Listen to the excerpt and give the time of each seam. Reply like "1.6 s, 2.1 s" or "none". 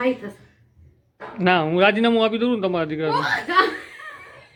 none